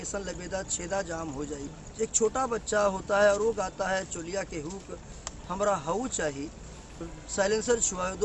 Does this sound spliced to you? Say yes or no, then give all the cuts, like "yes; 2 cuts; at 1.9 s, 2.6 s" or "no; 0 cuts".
yes; 2 cuts; at 1.7 s, 7.0 s